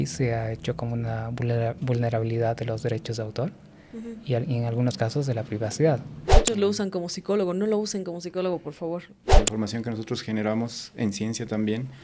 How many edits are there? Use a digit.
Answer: 2